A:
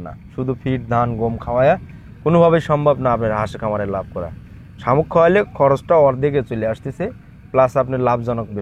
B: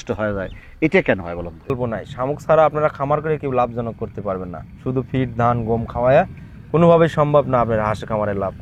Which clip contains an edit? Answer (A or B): B